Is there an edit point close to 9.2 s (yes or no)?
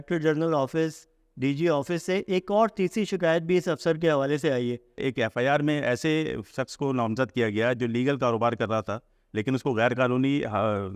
no